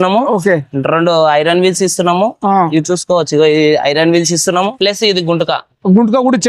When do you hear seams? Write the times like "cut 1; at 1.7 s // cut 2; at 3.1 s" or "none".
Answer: cut 1; at 4.7 s